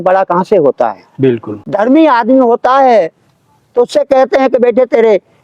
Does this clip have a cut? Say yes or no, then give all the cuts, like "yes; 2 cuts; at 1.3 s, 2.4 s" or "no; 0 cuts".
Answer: yes; 1 cut; at 1.6 s